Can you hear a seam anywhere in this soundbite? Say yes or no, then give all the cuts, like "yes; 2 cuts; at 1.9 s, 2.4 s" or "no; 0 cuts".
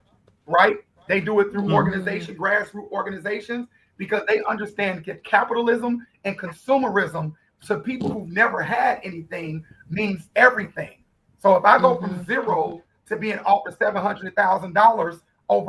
no; 0 cuts